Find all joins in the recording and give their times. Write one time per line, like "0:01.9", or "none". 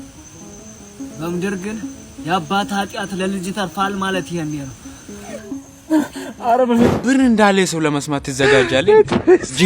0:06.9